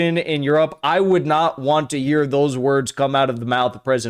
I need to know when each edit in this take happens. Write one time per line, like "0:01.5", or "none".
none